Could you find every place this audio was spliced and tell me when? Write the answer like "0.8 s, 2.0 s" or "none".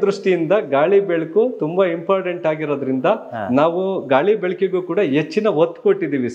none